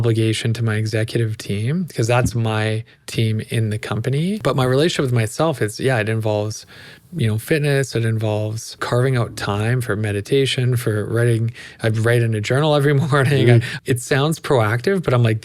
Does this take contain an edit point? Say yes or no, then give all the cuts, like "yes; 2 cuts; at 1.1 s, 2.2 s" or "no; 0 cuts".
yes; 3 cuts; at 4.4 s, 8.8 s, 13.7 s